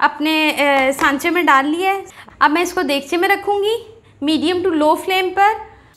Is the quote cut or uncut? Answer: cut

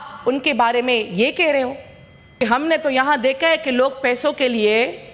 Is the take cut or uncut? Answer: cut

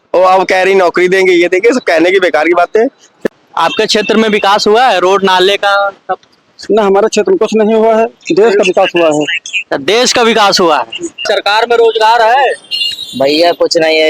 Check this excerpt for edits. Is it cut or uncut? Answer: cut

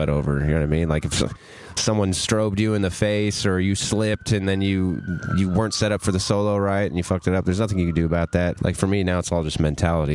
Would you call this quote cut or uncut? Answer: cut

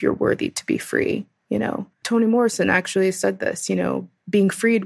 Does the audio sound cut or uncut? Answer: uncut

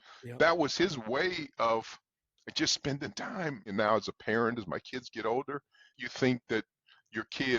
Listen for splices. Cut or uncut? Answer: cut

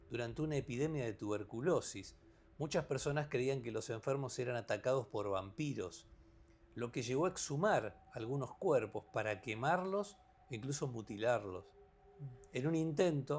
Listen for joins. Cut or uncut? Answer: uncut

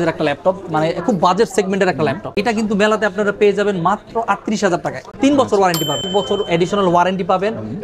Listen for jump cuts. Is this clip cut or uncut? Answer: cut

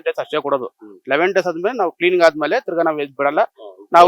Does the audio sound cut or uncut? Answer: uncut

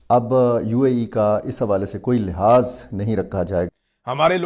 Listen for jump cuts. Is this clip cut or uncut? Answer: uncut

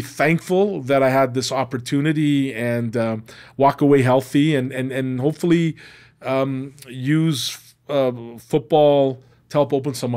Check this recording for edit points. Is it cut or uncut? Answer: uncut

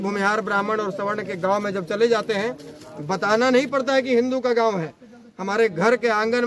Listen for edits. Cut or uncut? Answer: uncut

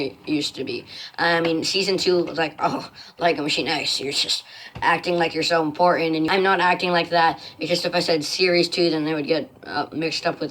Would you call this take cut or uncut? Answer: cut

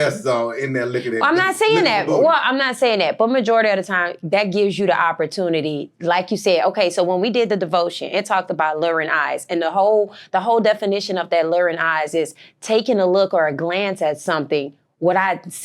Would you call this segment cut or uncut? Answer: uncut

